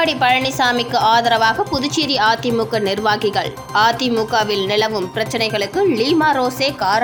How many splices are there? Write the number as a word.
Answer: zero